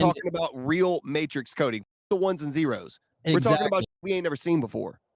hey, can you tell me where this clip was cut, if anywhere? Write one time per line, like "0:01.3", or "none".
none